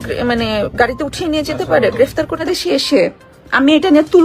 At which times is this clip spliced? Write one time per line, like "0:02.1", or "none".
0:02.4